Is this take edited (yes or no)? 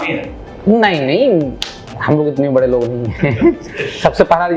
no